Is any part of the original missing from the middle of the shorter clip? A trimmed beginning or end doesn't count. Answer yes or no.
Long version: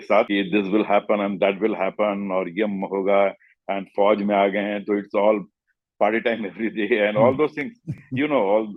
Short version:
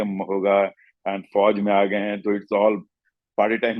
no